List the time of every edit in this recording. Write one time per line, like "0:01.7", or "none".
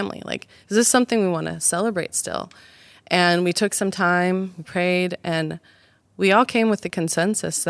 none